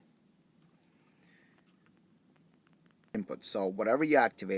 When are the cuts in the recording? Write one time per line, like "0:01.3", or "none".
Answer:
0:03.1